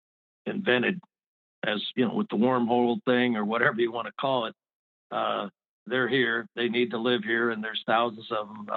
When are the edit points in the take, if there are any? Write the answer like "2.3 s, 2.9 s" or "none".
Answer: none